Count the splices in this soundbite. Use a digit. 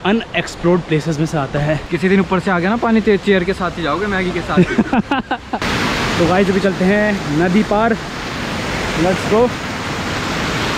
2